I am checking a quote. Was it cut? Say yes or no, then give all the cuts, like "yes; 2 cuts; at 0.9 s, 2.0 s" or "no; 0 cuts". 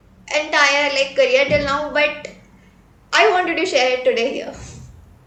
no; 0 cuts